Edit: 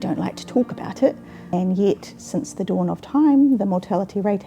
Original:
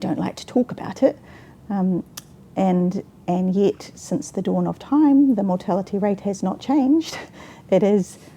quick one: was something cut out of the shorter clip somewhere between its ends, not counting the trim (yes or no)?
yes